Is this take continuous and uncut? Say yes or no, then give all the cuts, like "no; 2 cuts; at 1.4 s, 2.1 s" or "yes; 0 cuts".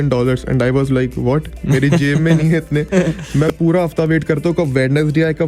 no; 1 cut; at 3.2 s